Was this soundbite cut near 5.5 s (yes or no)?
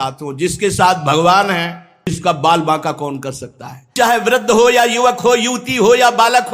no